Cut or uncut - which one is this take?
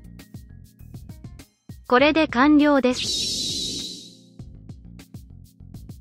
uncut